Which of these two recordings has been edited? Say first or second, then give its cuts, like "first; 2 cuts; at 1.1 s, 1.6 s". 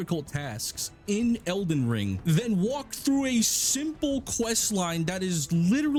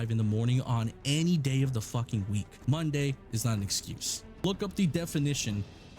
second; 2 cuts; at 2.5 s, 4.4 s